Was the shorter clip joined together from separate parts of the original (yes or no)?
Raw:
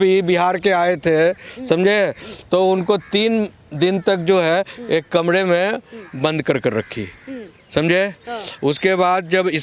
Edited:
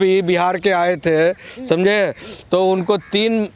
no